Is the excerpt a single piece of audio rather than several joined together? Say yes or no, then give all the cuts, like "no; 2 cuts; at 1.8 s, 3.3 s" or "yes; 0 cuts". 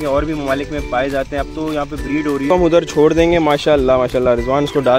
no; 1 cut; at 2.5 s